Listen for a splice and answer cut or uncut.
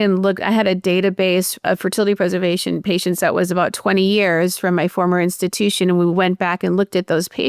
uncut